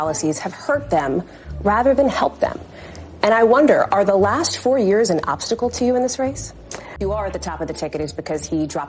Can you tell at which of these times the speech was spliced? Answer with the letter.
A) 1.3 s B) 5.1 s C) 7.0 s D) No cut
C